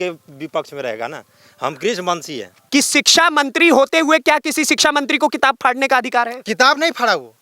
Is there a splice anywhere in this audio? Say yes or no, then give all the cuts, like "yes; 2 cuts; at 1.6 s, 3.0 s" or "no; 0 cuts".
yes; 1 cut; at 2.6 s